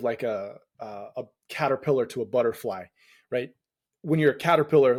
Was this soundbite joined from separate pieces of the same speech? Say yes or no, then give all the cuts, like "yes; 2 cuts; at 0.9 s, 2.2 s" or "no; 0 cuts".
no; 0 cuts